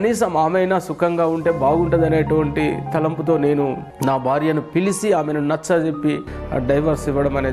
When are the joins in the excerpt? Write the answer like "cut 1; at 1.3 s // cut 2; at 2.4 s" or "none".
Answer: cut 1; at 3.9 s // cut 2; at 6.3 s